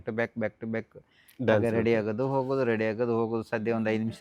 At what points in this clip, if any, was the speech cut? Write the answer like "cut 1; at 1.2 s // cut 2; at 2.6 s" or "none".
none

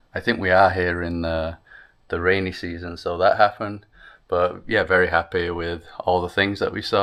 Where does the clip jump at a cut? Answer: none

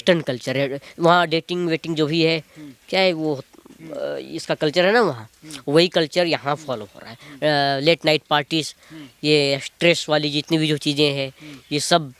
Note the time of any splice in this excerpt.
none

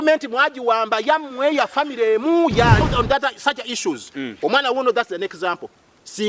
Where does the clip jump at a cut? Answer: cut 1; at 2.8 s

